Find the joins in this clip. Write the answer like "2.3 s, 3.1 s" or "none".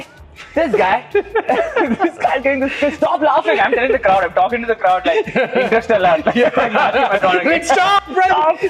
none